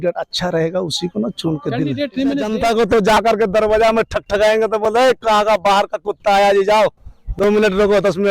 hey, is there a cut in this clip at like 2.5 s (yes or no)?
yes